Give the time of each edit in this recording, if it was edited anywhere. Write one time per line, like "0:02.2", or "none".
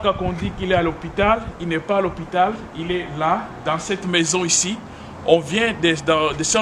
none